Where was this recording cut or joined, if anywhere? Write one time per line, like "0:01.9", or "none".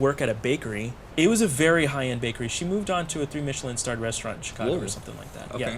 0:01.0